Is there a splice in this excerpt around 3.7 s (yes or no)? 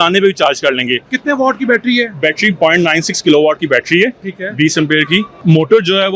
no